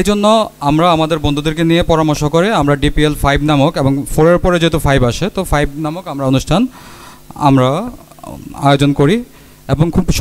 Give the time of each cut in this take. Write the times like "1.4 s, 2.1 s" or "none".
none